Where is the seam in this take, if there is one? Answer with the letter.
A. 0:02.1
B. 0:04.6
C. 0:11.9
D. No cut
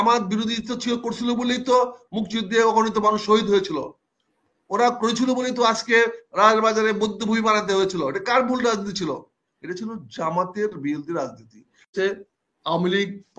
C